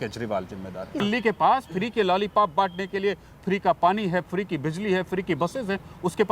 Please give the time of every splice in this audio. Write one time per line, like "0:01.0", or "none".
0:01.0